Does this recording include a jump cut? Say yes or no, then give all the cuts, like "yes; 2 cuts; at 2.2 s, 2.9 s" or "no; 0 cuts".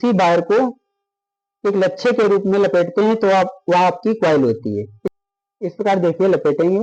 yes; 1 cut; at 5.0 s